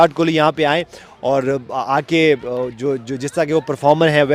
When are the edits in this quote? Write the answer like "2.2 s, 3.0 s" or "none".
none